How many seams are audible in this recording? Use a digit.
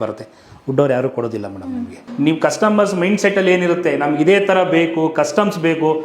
1